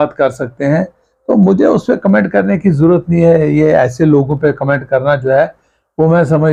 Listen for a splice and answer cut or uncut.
uncut